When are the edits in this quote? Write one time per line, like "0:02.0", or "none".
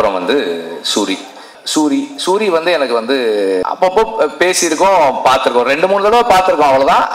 0:01.6
0:03.6